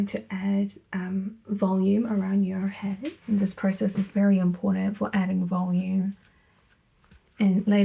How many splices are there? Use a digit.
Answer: 1